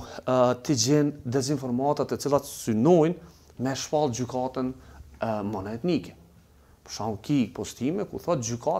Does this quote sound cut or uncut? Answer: uncut